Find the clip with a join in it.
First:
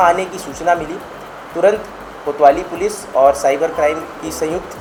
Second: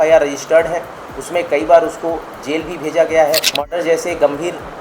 second; 1 cut; at 3.6 s

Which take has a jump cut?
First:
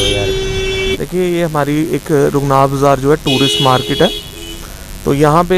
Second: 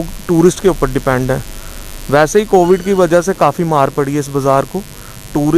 first; 1 cut; at 0.9 s

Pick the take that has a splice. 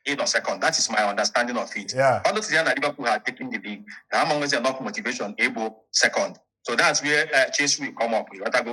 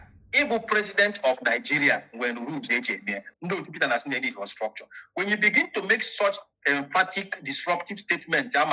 second; 1 cut; at 3.2 s

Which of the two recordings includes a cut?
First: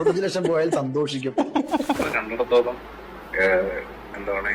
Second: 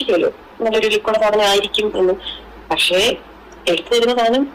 first; 1 cut; at 2.0 s

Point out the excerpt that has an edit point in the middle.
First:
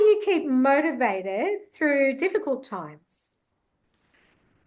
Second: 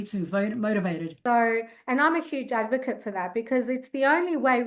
second; 1 cut; at 1.1 s

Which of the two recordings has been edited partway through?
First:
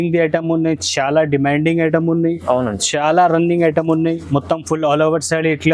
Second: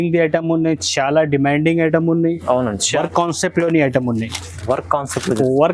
second; 1 cut; at 2.9 s

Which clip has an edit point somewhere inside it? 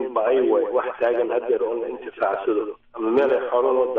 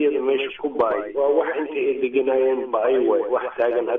first; 1 cut; at 2.8 s

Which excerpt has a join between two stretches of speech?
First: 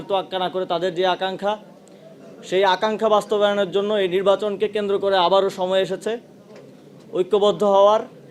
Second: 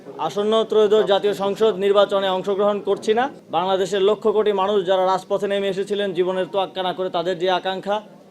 second; 1 cut; at 3.4 s

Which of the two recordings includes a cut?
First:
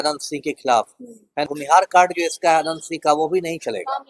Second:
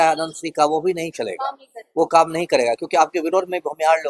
first; 1 cut; at 1.5 s

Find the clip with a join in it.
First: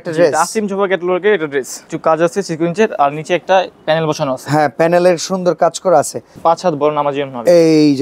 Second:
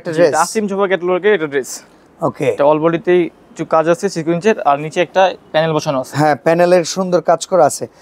first; 2 cuts; at 1.8 s, 6.3 s

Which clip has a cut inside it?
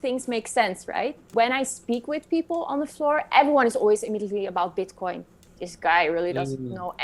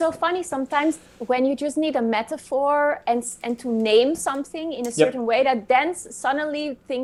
first; 2 cuts; at 1.2 s, 5.3 s

